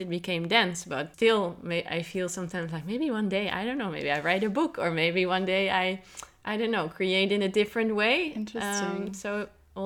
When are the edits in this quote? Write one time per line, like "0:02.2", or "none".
0:01.1